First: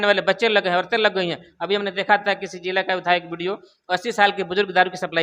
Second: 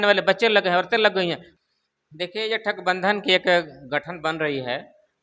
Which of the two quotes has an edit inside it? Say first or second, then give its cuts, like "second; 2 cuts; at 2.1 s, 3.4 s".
second; 1 cut; at 1.5 s